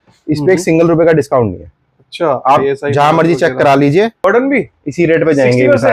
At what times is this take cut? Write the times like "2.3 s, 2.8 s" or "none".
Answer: 4.2 s